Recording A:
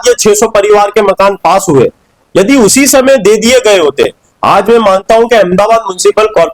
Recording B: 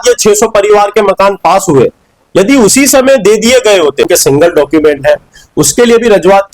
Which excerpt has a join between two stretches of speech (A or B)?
B